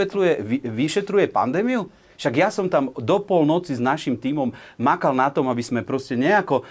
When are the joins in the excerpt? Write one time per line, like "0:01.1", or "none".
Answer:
none